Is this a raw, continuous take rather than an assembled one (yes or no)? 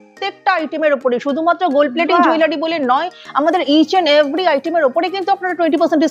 yes